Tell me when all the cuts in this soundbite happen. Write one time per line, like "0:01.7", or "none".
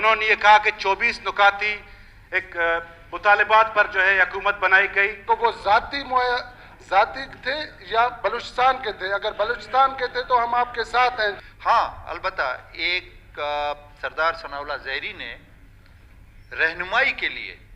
0:05.2
0:11.4